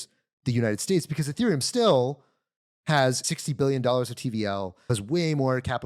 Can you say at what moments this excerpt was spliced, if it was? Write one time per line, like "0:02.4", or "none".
0:03.2
0:04.9